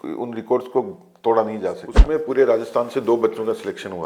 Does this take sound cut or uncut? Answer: cut